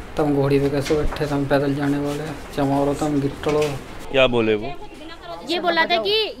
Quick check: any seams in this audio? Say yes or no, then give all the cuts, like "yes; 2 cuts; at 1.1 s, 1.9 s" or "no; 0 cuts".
yes; 1 cut; at 3.9 s